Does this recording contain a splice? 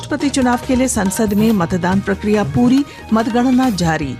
no; 0 cuts

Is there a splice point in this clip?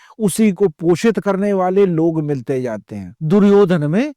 no; 0 cuts

